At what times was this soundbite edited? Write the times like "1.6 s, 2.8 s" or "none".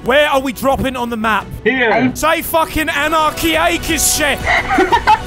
4.4 s